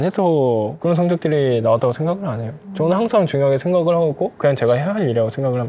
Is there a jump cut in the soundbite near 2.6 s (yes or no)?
yes